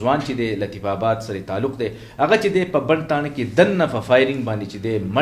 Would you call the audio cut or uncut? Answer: uncut